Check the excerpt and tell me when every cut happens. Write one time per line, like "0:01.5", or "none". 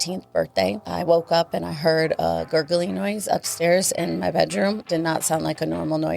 0:00.8
0:04.8